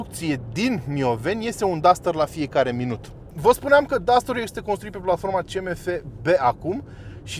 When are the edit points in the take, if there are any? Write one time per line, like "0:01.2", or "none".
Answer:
0:03.3